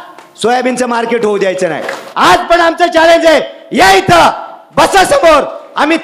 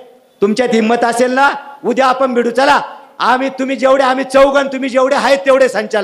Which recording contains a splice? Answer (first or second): first